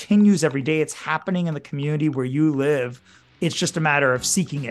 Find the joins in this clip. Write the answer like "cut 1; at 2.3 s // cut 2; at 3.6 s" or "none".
cut 1; at 3.2 s

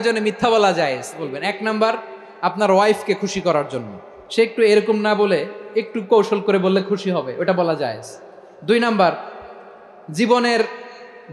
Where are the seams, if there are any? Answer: cut 1; at 1.2 s

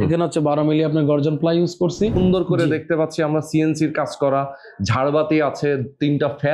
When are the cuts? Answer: cut 1; at 2.2 s

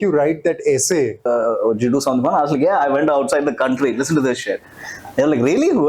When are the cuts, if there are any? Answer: cut 1; at 1.3 s

